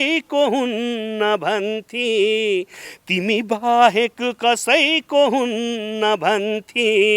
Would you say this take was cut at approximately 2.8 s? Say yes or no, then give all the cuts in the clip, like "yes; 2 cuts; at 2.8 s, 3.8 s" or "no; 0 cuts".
no; 0 cuts